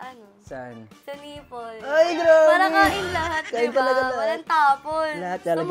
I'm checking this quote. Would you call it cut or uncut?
uncut